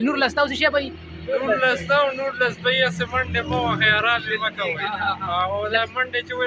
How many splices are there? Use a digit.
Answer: 0